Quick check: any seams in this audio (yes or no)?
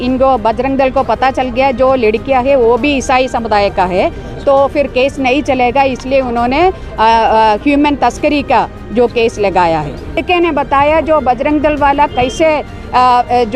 yes